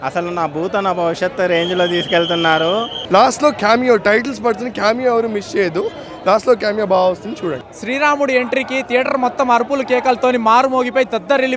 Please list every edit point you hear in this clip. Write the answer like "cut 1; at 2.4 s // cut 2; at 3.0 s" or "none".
cut 1; at 2.9 s // cut 2; at 7.7 s